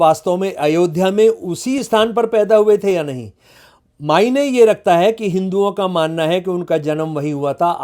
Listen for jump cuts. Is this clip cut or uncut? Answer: uncut